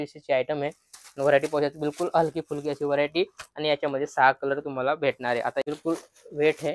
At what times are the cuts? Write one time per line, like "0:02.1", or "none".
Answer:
0:05.6